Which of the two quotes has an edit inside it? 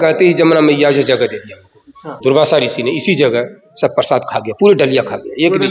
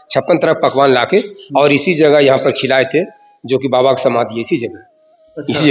first; 1 cut; at 2.1 s

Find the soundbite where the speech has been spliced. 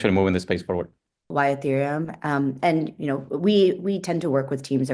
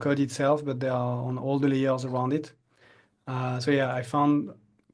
first; 1 cut; at 1.3 s

